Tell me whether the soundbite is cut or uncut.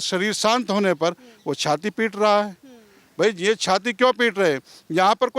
uncut